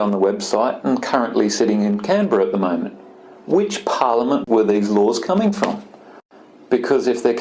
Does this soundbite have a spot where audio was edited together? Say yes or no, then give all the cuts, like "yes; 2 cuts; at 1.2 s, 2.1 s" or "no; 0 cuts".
no; 0 cuts